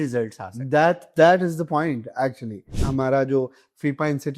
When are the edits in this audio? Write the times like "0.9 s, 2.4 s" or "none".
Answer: 2.7 s

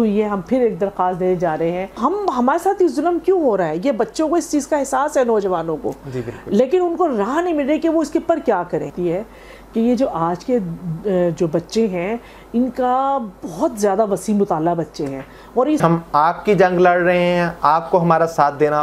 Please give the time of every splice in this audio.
2.0 s, 8.9 s, 15.8 s

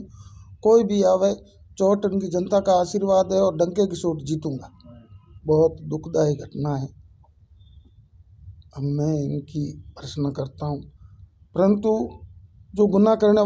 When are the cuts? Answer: 5.3 s

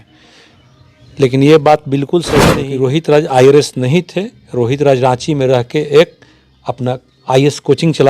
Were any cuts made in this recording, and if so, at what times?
2.6 s

